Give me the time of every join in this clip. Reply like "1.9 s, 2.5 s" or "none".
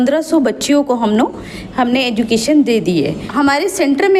3.2 s